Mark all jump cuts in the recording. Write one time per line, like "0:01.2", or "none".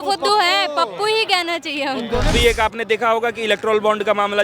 0:02.3